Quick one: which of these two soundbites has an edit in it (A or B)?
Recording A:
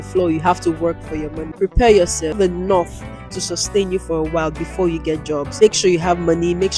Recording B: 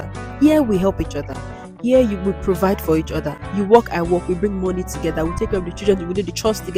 A